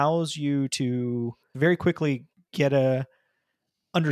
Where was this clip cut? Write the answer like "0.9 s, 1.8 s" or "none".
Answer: 1.5 s